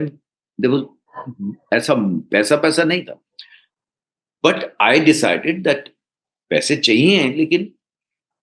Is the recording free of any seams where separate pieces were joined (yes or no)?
yes